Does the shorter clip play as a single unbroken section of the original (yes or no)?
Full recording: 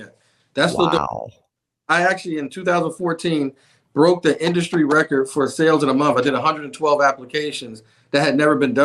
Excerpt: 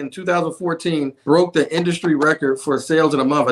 no